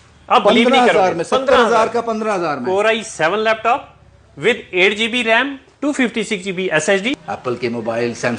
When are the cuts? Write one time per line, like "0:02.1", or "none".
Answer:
0:07.1